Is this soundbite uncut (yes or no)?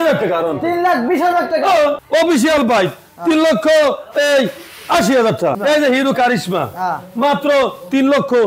no